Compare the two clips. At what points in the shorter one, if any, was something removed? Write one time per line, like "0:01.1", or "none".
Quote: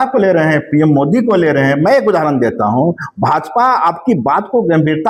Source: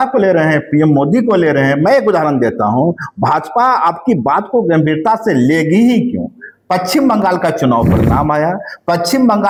none